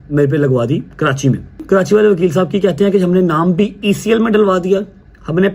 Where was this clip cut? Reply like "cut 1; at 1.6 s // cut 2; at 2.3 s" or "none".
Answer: cut 1; at 1.6 s